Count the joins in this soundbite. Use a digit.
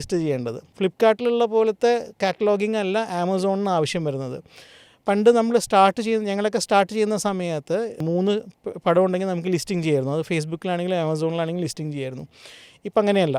0